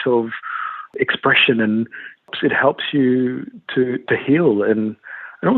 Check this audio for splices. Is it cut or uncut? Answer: cut